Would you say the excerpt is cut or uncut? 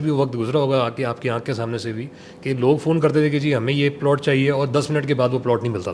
uncut